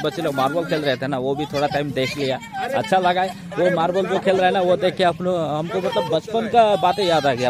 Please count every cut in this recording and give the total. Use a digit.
0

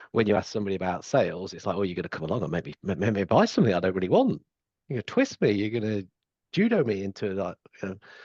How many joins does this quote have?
0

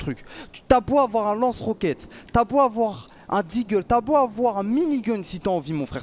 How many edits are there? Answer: 0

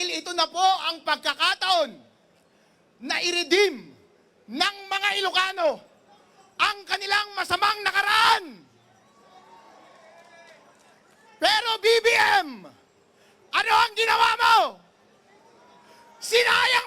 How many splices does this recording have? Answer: 0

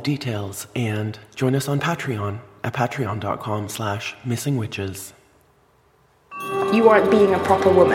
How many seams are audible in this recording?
1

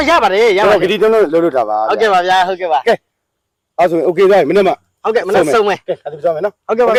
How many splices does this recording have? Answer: 0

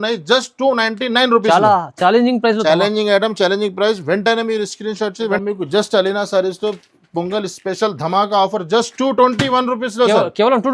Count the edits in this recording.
1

